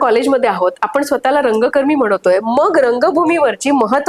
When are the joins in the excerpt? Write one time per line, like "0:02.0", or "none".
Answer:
none